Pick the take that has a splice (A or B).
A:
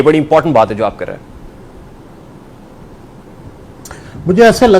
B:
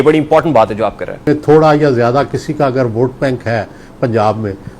B